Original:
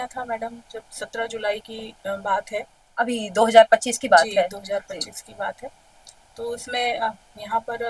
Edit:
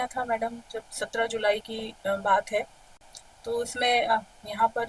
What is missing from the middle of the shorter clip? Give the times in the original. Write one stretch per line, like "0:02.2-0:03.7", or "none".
0:02.8-0:05.7